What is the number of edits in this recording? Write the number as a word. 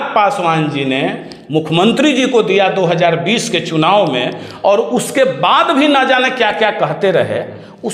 zero